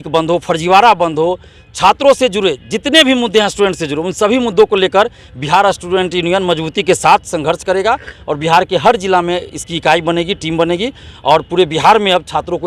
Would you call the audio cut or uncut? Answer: uncut